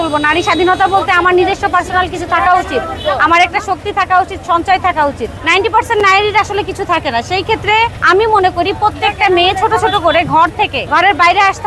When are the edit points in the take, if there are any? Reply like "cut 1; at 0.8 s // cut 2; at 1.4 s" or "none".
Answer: cut 1; at 5.3 s // cut 2; at 8.0 s // cut 3; at 10.8 s